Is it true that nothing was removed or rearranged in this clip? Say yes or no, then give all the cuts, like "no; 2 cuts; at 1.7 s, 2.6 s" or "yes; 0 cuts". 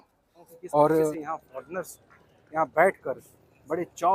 no; 1 cut; at 1.2 s